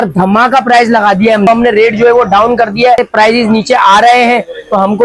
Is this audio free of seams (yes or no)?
no